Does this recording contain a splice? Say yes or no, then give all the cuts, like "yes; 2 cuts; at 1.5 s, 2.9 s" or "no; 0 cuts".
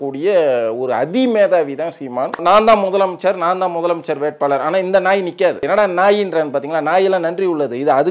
yes; 2 cuts; at 2.4 s, 5.7 s